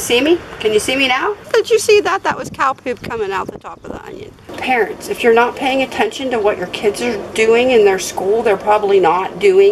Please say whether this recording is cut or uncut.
cut